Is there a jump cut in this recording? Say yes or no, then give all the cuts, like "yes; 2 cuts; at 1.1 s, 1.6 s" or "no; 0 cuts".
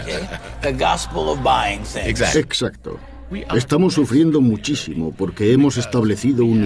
yes; 1 cut; at 1.6 s